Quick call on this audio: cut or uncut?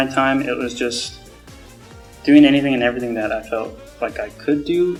uncut